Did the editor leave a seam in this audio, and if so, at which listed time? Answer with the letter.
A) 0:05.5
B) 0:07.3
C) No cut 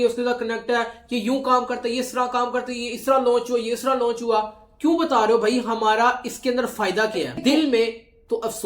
B